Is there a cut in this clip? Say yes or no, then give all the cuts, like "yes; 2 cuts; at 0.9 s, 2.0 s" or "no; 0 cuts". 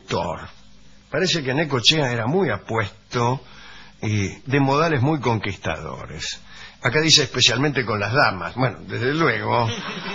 no; 0 cuts